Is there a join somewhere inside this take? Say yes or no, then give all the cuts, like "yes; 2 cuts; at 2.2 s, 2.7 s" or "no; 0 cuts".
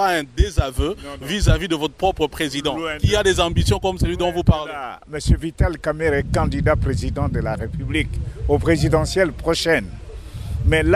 yes; 1 cut; at 6.2 s